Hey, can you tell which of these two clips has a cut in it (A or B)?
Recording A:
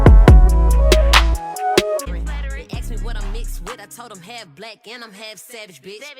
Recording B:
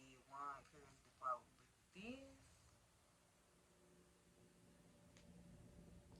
A